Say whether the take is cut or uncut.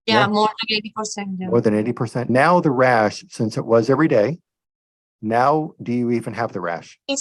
cut